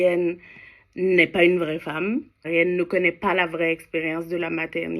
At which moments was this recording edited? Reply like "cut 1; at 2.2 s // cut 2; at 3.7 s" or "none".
cut 1; at 2.5 s